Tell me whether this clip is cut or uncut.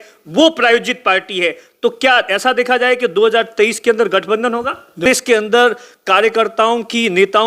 cut